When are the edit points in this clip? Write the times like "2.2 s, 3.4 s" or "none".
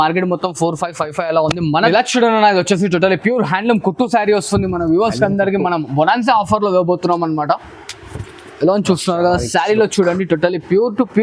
1.9 s